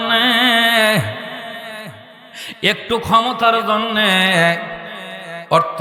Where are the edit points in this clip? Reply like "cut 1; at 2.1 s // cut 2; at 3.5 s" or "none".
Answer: none